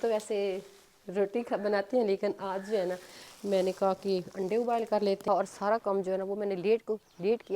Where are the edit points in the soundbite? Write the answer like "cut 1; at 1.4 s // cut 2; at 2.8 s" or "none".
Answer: cut 1; at 5.2 s